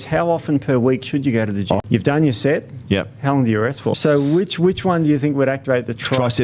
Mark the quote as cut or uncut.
cut